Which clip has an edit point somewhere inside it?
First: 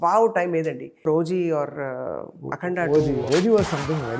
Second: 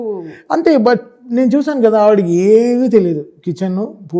first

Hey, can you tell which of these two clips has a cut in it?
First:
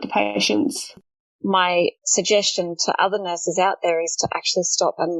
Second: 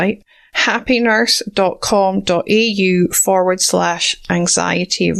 first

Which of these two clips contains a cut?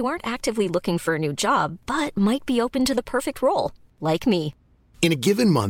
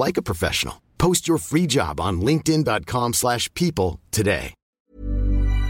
second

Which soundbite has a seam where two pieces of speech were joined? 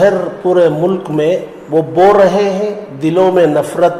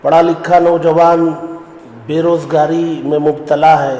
first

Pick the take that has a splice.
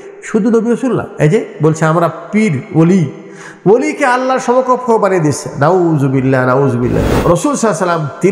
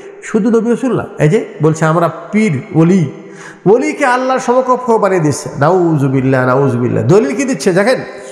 first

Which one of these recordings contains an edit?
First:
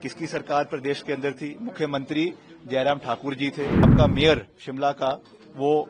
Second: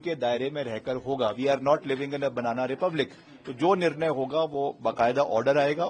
first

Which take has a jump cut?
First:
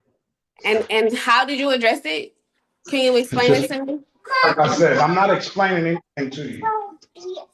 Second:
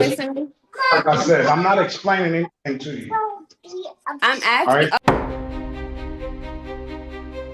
second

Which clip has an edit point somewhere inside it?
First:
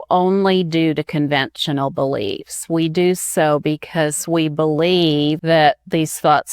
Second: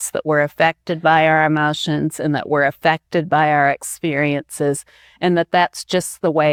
first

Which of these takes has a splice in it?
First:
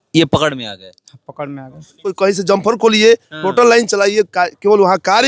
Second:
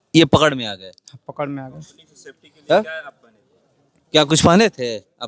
first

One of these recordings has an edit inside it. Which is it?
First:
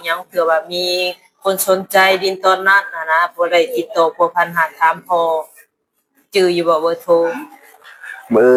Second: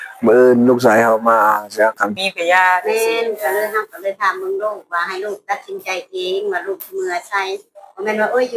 second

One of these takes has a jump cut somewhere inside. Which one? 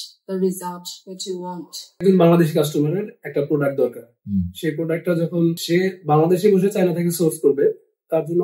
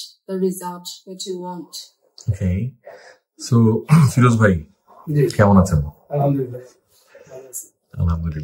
first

